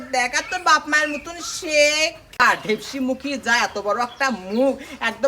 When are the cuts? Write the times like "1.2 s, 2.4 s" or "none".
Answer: 2.4 s